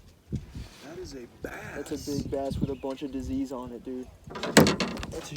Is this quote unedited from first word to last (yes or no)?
no